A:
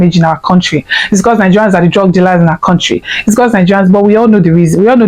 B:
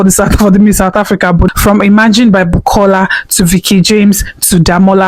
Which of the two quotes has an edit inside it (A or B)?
B